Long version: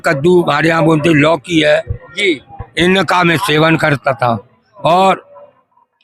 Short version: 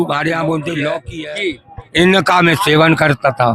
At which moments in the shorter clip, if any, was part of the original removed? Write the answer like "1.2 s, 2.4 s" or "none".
1.1 s

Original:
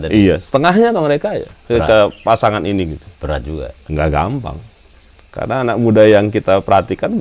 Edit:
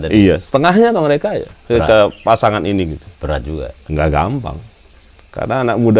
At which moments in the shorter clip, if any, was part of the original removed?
none

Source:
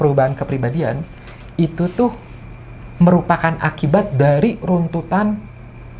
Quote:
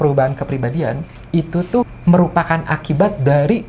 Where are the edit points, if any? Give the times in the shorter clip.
1.1 s, 1.9 s

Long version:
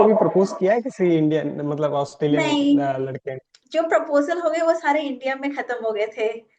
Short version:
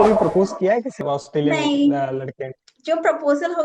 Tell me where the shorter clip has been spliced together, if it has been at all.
1.0 s

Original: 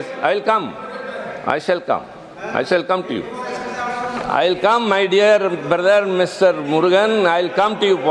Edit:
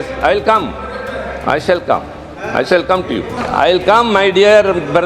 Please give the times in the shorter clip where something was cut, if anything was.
3.4 s

